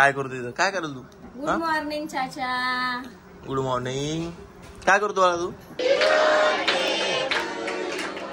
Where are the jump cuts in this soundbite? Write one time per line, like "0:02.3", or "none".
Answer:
0:05.8